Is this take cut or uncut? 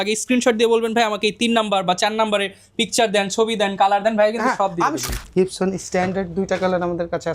cut